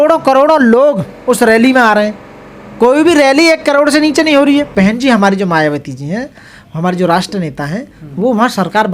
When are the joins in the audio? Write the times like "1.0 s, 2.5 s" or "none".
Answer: 4.7 s